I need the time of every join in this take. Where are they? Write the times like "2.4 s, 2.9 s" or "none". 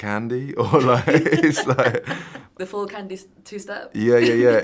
2.5 s